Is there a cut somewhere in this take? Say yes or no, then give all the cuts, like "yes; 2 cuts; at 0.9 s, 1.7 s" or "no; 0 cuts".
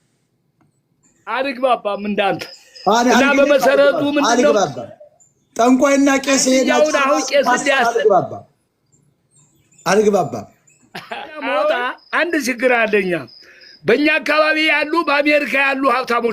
yes; 1 cut; at 11.9 s